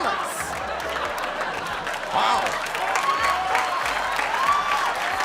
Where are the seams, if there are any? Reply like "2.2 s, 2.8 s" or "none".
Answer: none